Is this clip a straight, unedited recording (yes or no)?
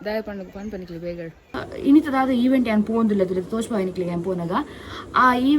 no